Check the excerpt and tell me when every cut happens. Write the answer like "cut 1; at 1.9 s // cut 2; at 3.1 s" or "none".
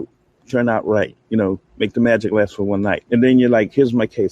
cut 1; at 3.0 s